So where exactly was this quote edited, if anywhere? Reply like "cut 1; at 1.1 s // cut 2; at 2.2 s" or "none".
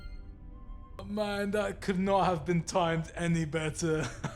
cut 1; at 1.0 s